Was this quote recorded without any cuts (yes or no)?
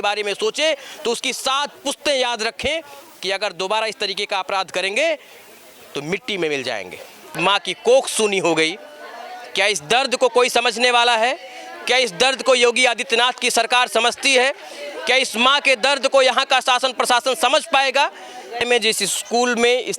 no